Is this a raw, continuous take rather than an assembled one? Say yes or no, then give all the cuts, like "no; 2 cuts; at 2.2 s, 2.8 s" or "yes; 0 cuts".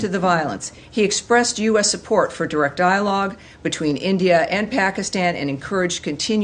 yes; 0 cuts